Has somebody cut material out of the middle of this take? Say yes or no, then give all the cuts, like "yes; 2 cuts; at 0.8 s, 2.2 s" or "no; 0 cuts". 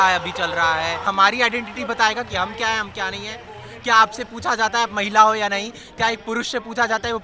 yes; 1 cut; at 1.1 s